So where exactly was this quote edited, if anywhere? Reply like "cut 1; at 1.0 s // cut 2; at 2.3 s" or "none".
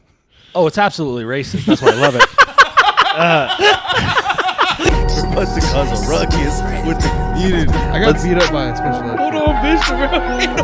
cut 1; at 4.9 s